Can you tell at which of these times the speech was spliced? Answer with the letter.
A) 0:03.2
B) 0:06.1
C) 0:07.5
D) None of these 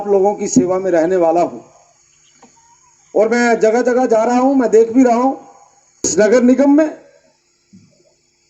B